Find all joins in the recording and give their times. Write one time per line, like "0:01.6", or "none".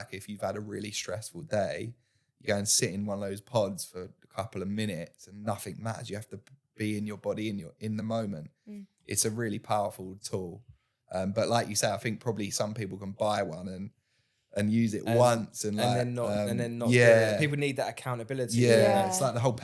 none